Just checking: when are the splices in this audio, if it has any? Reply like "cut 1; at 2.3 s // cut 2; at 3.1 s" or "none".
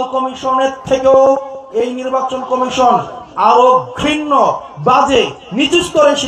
none